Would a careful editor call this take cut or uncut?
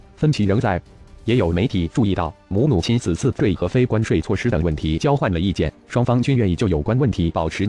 uncut